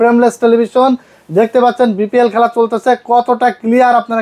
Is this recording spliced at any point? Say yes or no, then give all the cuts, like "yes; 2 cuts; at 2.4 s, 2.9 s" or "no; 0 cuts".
no; 0 cuts